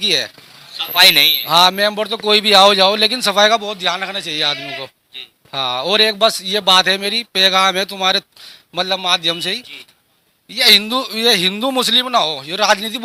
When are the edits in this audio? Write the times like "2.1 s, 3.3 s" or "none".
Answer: none